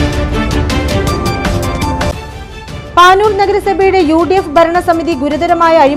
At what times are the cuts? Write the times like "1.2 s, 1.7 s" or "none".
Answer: 2.3 s